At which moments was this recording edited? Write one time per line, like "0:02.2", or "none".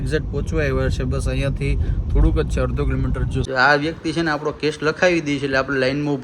0:03.4

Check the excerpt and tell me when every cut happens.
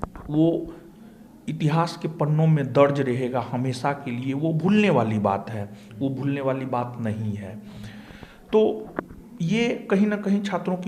none

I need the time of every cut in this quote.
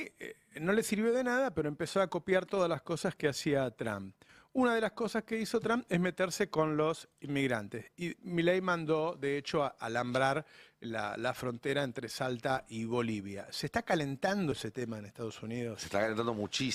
none

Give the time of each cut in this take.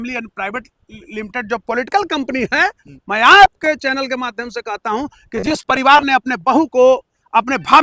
none

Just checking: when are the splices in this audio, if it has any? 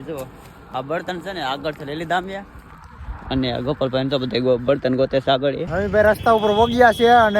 0:05.6

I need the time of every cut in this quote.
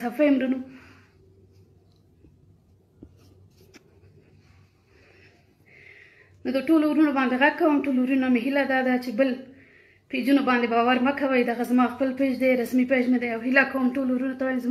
none

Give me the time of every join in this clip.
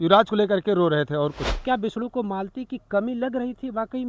0:01.5

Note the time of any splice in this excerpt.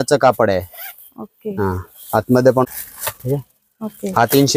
0:02.6

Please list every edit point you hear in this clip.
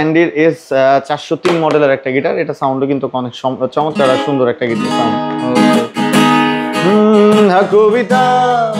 none

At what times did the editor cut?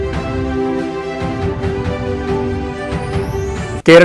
0:03.0

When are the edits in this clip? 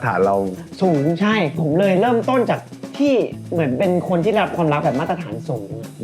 0:01.5

